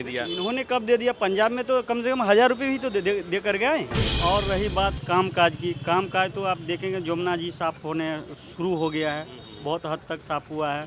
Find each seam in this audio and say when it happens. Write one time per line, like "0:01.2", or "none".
0:04.0